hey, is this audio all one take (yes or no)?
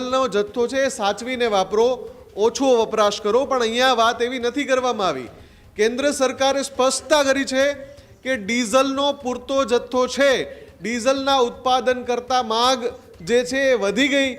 yes